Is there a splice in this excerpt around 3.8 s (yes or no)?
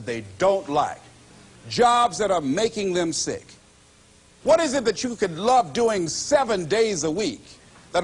yes